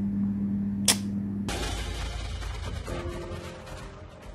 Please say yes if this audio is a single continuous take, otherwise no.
no